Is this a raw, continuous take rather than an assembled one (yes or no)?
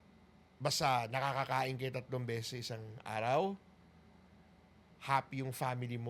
yes